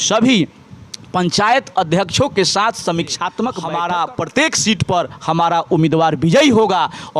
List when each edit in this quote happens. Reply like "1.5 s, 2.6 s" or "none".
3.6 s